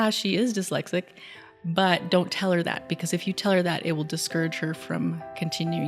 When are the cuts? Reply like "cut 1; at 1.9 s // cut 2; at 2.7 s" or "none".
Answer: none